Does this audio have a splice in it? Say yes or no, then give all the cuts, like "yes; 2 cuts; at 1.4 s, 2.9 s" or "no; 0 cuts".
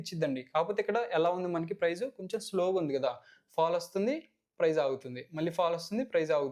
no; 0 cuts